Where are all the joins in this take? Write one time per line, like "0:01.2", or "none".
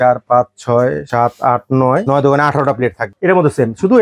0:01.0
0:02.0
0:03.1